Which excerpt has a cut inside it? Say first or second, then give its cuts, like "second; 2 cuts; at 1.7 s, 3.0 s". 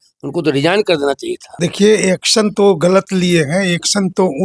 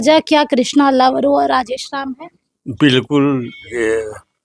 first; 1 cut; at 1.4 s